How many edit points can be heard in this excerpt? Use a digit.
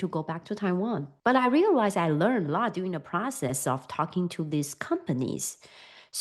1